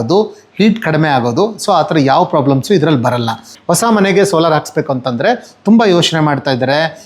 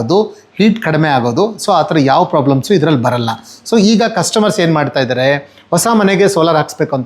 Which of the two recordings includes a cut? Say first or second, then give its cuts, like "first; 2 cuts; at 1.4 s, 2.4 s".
first; 1 cut; at 3.5 s